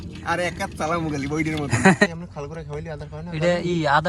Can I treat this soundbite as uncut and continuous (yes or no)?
no